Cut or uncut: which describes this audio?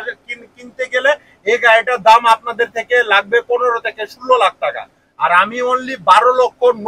uncut